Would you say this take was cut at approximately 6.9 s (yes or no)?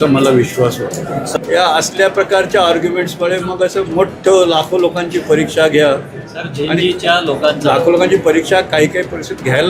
no